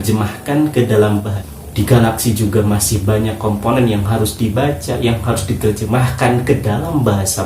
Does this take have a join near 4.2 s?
no; 1 cut; at 1.4 s

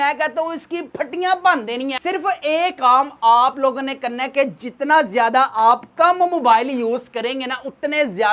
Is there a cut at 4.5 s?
no; 1 cut; at 2.0 s

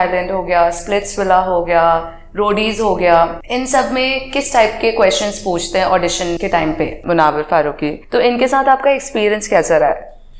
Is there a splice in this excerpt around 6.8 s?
yes; 3 cuts; at 3.4 s, 6.8 s, 8.0 s

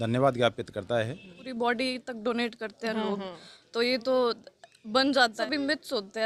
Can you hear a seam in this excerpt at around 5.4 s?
yes; 2 cuts; at 1.4 s, 5.4 s

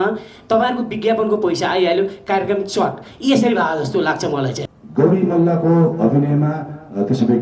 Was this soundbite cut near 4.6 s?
yes; 1 cut; at 4.6 s

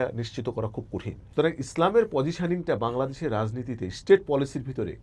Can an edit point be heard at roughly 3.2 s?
no; 1 cut; at 1.2 s

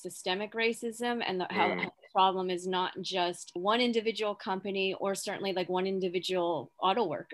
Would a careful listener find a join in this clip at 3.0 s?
no; 0 cuts

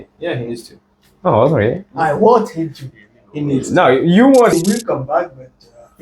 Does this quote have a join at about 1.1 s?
no; 1 cut; at 4.5 s

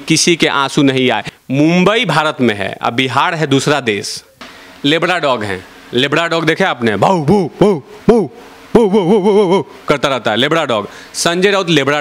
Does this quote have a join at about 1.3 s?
yes; 2 cuts; at 1.3 s, 4.4 s

